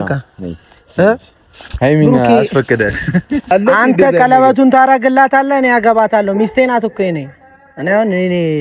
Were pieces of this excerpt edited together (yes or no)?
yes